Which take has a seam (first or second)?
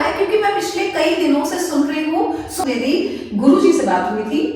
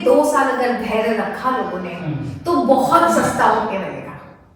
first